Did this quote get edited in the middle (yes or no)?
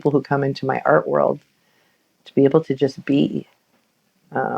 yes